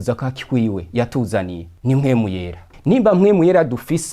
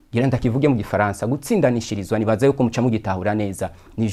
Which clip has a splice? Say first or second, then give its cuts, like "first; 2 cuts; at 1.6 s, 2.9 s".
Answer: first; 2 cuts; at 1.6 s, 2.7 s